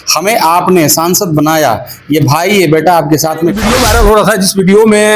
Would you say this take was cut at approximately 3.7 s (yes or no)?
yes